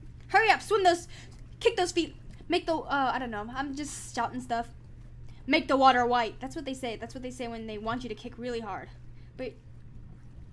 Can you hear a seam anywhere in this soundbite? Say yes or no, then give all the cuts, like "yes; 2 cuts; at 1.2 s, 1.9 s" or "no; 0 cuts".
yes; 1 cut; at 5.3 s